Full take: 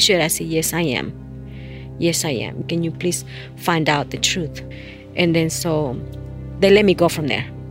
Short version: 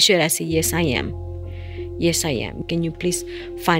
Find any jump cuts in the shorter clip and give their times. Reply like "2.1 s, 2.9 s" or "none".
none